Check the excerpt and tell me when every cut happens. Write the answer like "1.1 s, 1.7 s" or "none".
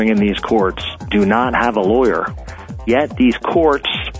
2.3 s